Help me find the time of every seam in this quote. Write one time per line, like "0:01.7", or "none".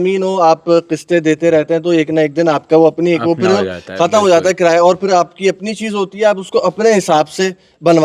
none